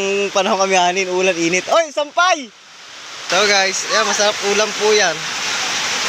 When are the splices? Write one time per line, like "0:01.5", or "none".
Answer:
0:03.1